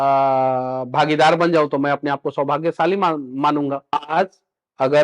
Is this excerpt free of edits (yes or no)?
no